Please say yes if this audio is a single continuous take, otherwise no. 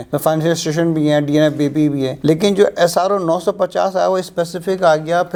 yes